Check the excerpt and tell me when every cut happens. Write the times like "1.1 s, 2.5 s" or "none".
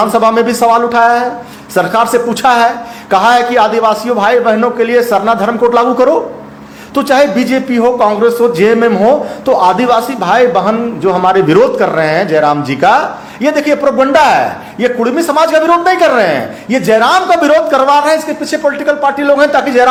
none